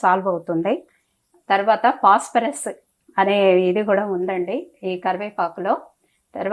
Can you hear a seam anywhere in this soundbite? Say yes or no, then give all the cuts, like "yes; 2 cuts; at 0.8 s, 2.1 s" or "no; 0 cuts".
no; 0 cuts